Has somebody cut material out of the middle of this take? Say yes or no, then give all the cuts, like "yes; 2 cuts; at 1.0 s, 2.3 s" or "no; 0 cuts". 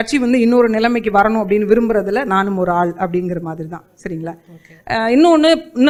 no; 0 cuts